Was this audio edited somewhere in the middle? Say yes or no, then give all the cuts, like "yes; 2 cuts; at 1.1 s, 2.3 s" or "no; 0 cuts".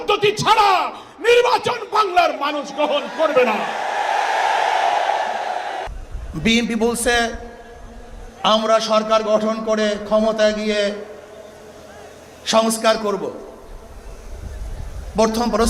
yes; 1 cut; at 5.8 s